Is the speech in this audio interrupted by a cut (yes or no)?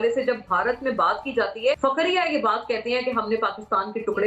yes